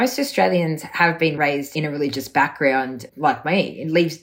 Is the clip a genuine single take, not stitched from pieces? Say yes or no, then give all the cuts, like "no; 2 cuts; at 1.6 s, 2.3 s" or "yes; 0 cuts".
no; 2 cuts; at 1.4 s, 3.0 s